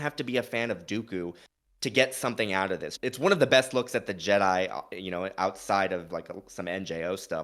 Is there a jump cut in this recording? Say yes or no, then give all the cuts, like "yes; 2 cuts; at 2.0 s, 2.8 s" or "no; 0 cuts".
yes; 2 cuts; at 2.9 s, 6.1 s